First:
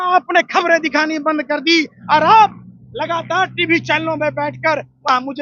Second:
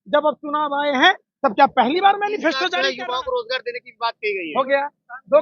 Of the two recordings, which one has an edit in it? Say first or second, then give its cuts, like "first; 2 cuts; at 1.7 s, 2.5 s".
second; 1 cut; at 2.6 s